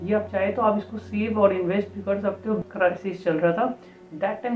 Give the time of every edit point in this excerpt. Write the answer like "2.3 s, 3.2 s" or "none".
2.6 s